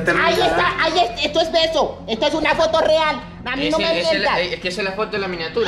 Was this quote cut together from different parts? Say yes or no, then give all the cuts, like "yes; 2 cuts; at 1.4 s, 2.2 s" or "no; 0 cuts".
no; 0 cuts